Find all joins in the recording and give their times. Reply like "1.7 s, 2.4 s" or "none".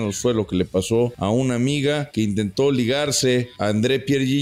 1.2 s, 2.1 s, 3.5 s